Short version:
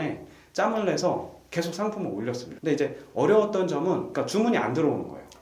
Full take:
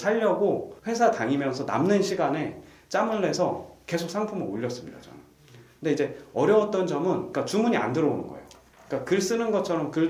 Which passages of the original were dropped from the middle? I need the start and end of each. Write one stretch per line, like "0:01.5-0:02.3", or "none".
0:04.8-0:05.7